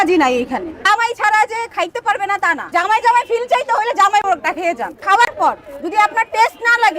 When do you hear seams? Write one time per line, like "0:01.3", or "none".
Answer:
0:00.9
0:02.7
0:05.0